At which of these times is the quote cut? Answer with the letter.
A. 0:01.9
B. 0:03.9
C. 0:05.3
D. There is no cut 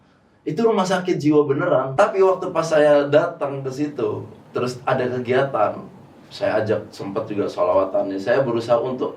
A